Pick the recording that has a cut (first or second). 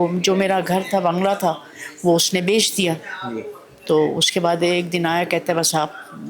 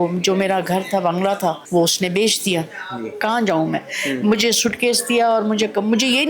second